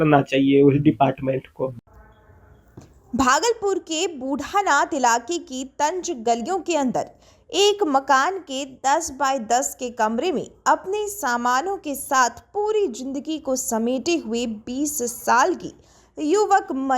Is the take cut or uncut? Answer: cut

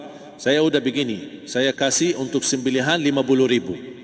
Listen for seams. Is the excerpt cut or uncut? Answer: uncut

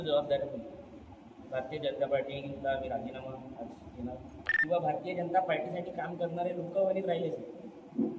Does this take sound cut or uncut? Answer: cut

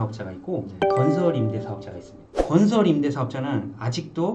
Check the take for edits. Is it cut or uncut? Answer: uncut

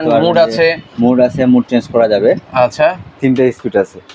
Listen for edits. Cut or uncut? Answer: cut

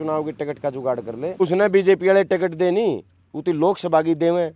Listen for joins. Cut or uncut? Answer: cut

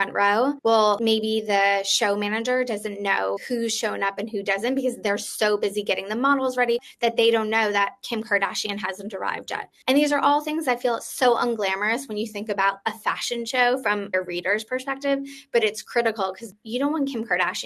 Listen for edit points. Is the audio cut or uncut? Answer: cut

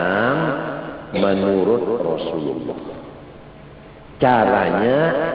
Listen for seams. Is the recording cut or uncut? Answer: uncut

